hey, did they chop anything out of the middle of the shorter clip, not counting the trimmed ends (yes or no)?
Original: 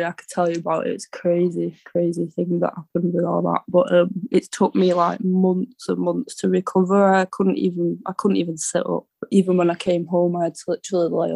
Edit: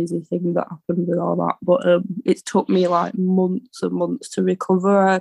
no